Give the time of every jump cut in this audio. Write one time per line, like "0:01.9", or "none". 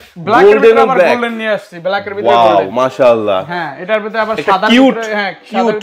none